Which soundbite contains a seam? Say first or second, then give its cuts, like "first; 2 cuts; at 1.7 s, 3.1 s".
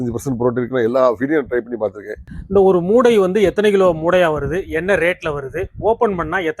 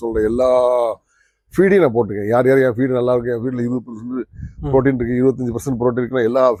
first; 1 cut; at 2.4 s